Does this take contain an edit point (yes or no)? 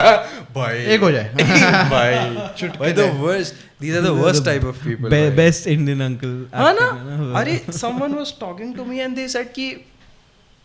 no